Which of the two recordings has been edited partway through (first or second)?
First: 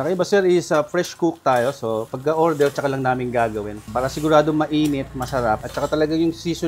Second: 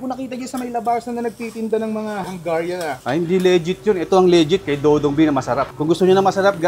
second